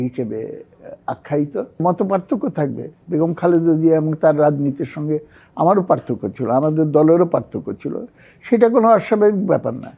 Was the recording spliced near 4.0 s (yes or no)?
no